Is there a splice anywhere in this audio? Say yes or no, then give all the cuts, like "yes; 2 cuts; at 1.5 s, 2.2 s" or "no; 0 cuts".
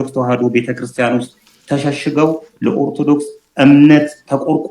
no; 0 cuts